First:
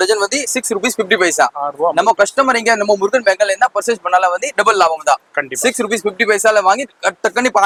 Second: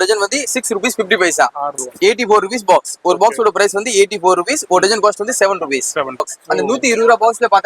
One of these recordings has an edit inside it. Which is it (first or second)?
second